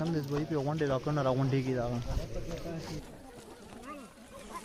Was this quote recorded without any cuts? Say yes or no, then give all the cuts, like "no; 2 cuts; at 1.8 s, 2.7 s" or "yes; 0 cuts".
yes; 0 cuts